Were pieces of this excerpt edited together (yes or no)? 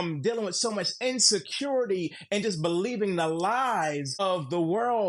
yes